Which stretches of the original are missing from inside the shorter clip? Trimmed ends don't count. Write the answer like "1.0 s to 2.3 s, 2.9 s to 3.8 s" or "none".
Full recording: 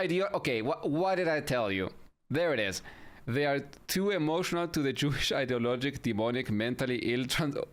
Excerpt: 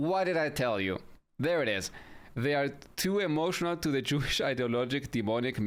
none